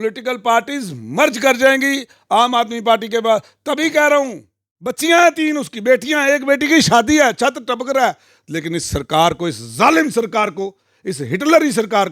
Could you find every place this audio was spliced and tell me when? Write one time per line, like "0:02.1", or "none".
0:05.0

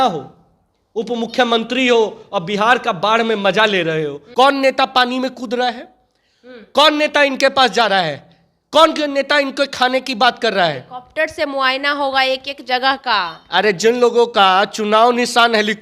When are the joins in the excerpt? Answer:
0:04.2

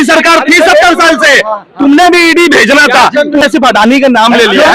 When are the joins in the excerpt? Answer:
0:03.4

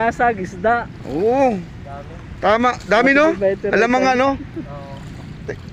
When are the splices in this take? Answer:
none

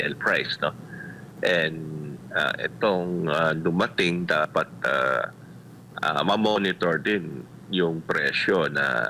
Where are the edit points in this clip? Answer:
none

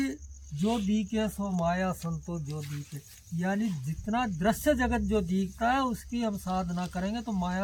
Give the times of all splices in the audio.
none

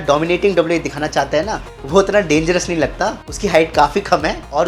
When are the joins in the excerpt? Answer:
none

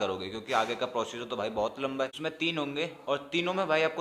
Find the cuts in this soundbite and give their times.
0:02.1

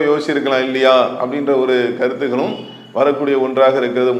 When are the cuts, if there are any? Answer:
none

